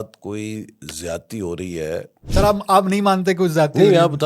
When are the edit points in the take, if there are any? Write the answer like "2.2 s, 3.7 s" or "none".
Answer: 2.2 s